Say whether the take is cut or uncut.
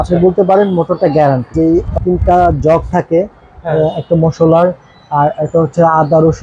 cut